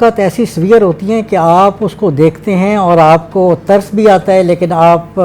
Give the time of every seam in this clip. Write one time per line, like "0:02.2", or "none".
none